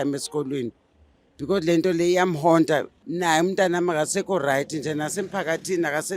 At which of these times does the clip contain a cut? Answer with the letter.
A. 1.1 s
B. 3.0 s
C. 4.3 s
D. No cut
B